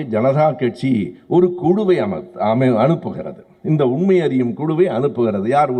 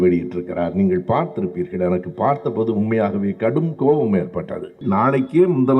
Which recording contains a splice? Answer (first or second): second